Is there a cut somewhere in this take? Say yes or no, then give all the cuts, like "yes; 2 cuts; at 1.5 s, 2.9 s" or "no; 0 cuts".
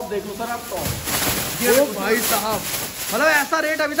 no; 0 cuts